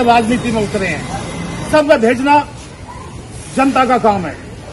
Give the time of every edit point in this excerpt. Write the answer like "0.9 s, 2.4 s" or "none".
1.7 s